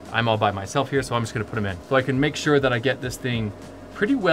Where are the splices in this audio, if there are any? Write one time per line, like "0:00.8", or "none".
0:01.8